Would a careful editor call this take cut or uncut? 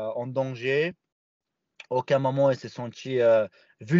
uncut